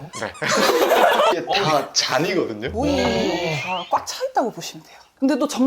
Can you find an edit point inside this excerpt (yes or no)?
yes